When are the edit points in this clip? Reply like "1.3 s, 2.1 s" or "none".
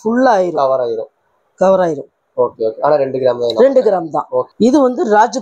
4.5 s